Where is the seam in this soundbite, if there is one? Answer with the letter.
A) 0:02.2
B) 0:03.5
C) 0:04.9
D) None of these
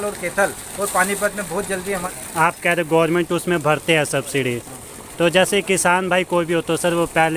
A